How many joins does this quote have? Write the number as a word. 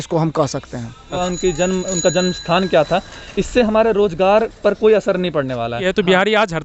two